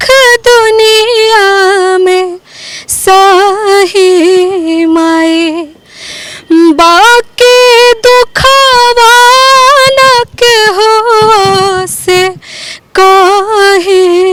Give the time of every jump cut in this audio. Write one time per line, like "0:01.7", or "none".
none